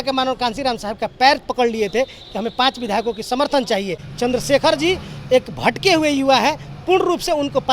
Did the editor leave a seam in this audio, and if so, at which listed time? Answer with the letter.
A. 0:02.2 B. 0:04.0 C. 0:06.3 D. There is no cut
B